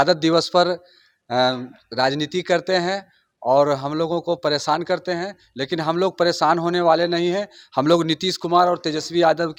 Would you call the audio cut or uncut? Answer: uncut